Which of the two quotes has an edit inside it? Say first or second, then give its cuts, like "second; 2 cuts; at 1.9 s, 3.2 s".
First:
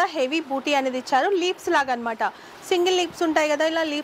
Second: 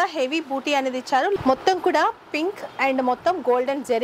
second; 1 cut; at 1.4 s